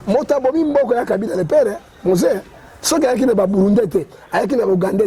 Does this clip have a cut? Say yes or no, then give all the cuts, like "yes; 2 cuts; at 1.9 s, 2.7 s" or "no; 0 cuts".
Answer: no; 0 cuts